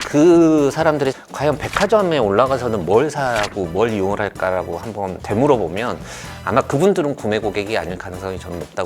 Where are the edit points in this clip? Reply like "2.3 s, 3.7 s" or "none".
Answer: 1.1 s, 5.2 s